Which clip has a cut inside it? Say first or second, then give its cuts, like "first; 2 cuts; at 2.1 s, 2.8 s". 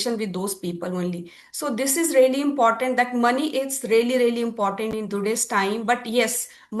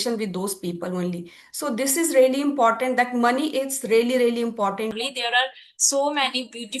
second; 1 cut; at 4.9 s